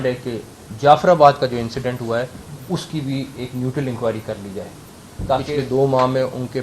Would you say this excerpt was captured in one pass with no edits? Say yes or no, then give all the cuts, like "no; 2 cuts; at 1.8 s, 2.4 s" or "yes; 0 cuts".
no; 1 cut; at 5.4 s